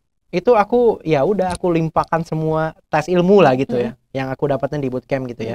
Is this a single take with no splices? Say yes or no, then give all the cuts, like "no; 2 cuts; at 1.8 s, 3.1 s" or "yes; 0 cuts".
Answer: yes; 0 cuts